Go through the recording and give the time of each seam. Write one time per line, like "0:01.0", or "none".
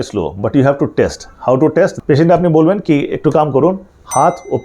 0:02.0